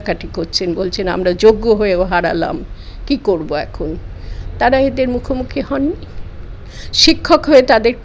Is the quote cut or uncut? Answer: uncut